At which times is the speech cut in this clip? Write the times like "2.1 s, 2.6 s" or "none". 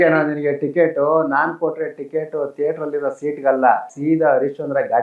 3.9 s

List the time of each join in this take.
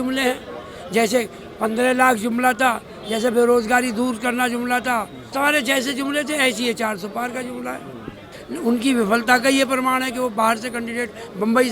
5.2 s, 8.3 s

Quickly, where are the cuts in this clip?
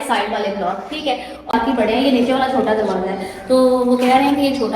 1.5 s

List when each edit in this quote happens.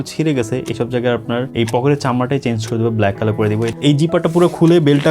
1.5 s, 3.7 s

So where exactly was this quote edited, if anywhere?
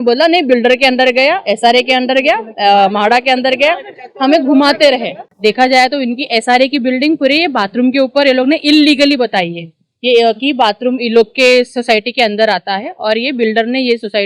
5.2 s

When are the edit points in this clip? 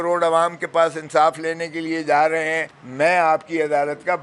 none

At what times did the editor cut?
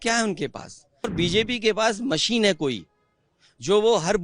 1.1 s

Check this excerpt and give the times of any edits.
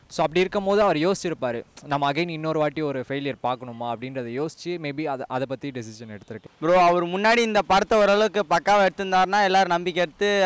6.4 s

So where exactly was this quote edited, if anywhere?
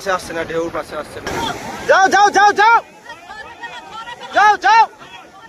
1.3 s

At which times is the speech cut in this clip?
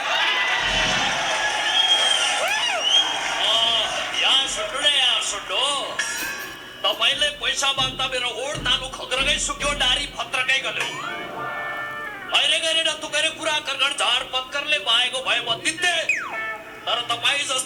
none

